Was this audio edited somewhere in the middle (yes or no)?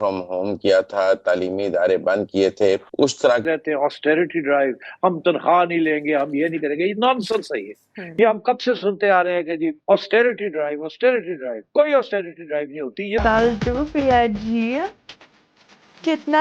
yes